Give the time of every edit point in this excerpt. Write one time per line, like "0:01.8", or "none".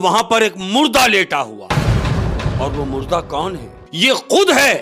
0:03.8